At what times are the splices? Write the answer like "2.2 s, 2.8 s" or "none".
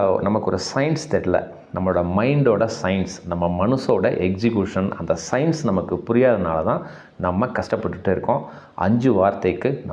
none